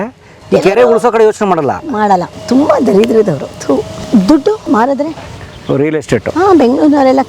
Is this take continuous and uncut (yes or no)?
no